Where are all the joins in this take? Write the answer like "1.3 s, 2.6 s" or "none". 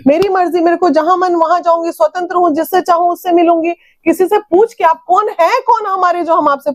none

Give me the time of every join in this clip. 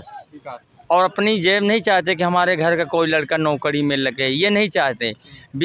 none

